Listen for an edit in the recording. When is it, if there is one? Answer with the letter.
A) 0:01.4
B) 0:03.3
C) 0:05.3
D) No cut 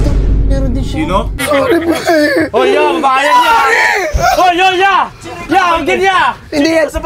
A